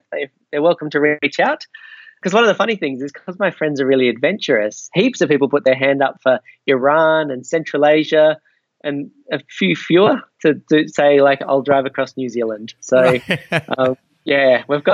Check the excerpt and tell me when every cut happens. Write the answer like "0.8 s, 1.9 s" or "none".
2.1 s